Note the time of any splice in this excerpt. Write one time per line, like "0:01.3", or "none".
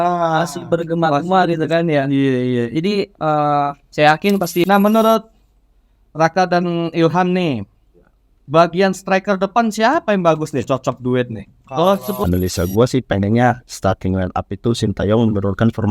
0:04.6
0:12.2